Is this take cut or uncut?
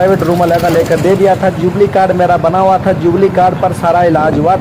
uncut